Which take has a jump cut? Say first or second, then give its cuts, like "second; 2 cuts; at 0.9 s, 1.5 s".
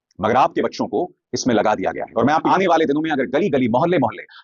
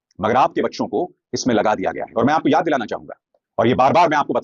first; 1 cut; at 2.4 s